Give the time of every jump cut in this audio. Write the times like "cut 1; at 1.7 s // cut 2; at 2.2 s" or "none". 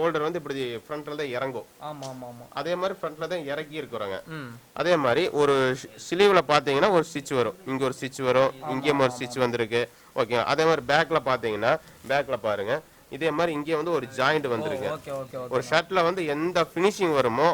none

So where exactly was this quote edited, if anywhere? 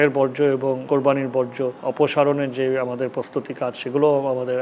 cut 1; at 0.8 s // cut 2; at 1.8 s

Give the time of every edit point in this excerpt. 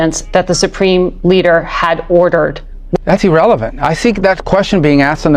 cut 1; at 3.0 s

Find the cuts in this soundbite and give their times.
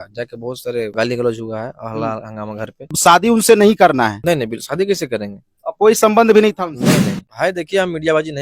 cut 1; at 0.9 s // cut 2; at 2.9 s // cut 3; at 4.2 s // cut 4; at 7.2 s

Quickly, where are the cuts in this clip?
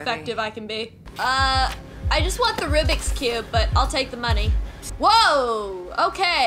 cut 1; at 1.0 s // cut 2; at 4.9 s

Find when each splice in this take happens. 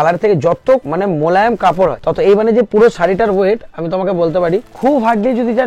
cut 1; at 0.9 s // cut 2; at 2.0 s // cut 3; at 4.7 s

